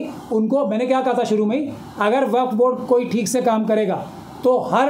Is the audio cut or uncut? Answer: uncut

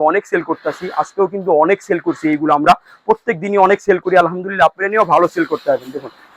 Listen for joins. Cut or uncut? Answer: uncut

